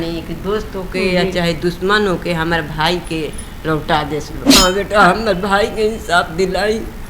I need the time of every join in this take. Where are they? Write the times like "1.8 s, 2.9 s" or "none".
4.4 s

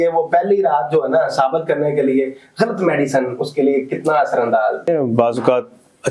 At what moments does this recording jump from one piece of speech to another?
4.9 s

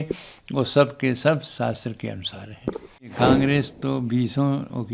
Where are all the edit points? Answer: 3.1 s

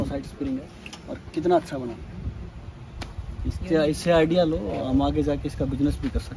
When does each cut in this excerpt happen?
none

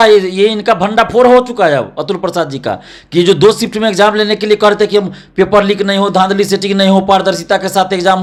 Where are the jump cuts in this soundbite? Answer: none

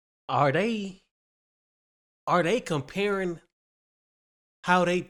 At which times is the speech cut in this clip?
none

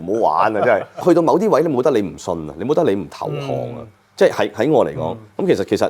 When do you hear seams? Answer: 1.0 s

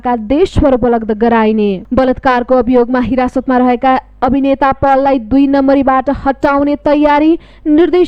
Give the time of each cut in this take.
1.8 s

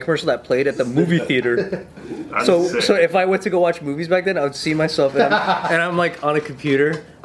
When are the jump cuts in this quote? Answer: none

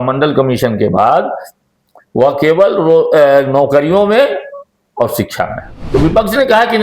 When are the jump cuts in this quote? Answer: 5.7 s

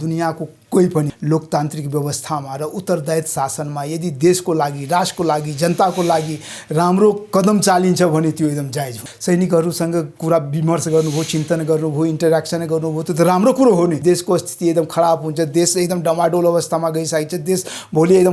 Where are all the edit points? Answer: 1.1 s, 9.1 s, 14.0 s

